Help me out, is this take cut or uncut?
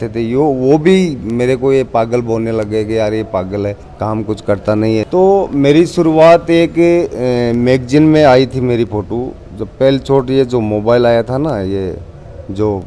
uncut